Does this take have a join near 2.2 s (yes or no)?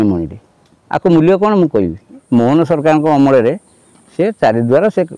yes